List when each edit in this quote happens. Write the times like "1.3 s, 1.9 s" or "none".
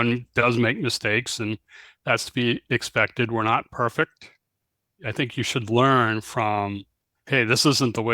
5.0 s